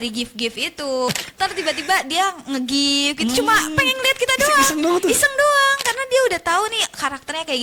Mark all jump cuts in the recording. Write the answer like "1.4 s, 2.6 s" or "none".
1.1 s